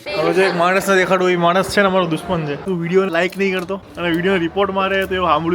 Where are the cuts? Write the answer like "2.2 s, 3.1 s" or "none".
2.6 s, 3.8 s